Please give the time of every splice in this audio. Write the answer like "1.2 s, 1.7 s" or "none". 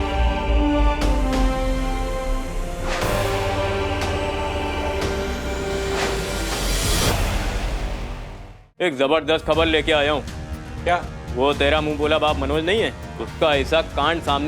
8.1 s